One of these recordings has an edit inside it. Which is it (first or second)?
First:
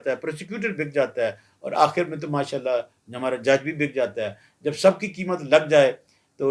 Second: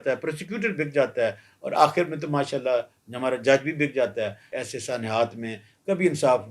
second